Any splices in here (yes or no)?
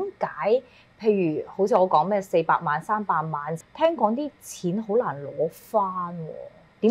yes